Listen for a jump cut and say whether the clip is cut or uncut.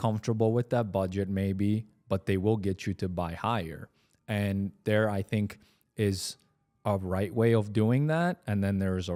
uncut